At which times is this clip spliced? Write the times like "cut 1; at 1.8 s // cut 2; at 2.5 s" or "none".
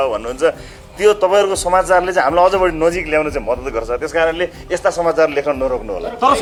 none